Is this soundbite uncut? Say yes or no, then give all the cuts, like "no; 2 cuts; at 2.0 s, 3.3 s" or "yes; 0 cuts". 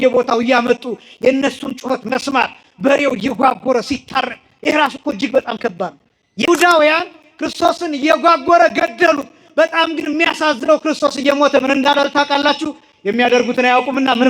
no; 1 cut; at 6.5 s